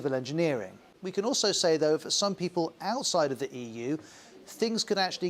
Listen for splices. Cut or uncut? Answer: cut